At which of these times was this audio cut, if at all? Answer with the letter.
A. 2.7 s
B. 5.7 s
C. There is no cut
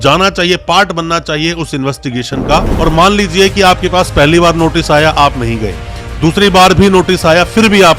A